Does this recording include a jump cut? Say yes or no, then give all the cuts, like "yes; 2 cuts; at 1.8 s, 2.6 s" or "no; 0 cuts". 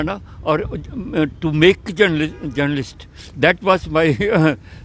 no; 0 cuts